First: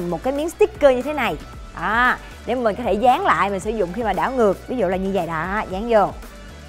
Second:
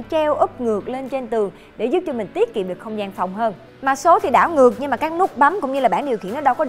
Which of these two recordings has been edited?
second; 1 cut; at 3.7 s

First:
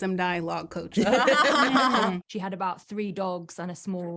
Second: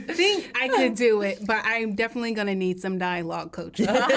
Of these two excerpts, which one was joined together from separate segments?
first; 1 cut; at 2.3 s

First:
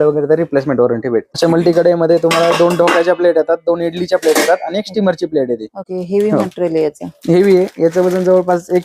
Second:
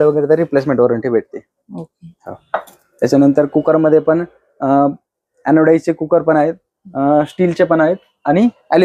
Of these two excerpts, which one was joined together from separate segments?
first; 2 cuts; at 1.3 s, 5.8 s

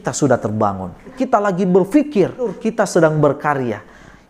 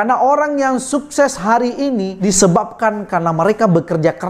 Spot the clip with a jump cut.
first; 2 cuts; at 1.1 s, 2.6 s

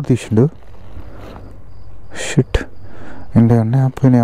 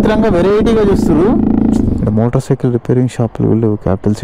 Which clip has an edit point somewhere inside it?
second; 1 cut; at 2.0 s

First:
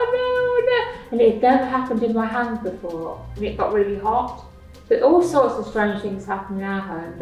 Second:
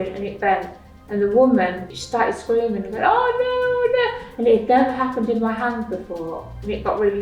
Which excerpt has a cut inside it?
second; 1 cut; at 1.9 s

